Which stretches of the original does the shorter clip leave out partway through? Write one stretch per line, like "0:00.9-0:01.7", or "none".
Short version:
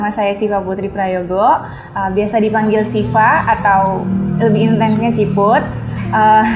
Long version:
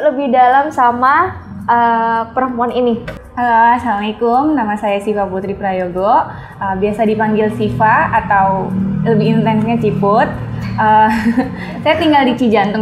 none